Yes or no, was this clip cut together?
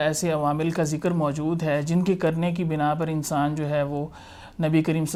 no